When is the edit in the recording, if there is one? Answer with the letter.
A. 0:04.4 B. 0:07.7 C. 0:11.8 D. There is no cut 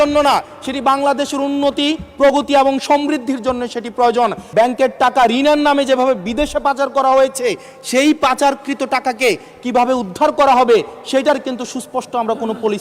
A